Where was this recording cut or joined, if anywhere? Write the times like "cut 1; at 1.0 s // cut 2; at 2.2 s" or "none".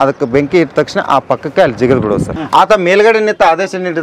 cut 1; at 2.3 s